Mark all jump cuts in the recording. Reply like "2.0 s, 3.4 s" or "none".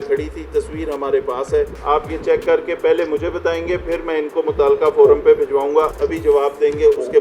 1.8 s, 5.9 s